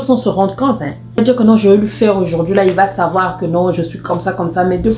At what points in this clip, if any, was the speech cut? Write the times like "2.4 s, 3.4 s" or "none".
1.2 s